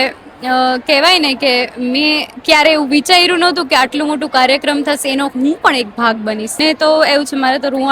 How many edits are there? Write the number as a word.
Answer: one